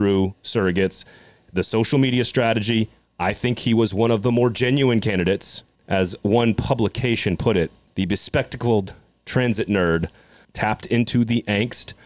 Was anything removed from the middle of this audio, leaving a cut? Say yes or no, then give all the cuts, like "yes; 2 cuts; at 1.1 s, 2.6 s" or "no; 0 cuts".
yes; 2 cuts; at 5.7 s, 10.4 s